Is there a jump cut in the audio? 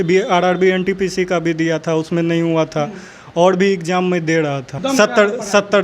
yes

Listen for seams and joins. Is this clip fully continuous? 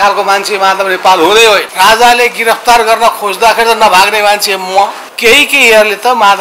no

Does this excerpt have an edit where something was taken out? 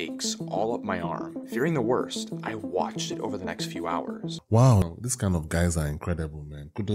yes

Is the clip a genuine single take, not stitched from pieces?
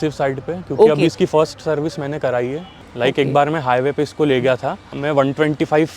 no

